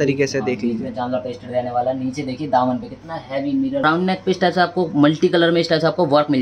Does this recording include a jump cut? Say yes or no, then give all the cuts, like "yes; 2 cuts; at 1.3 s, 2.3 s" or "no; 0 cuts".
yes; 1 cut; at 3.8 s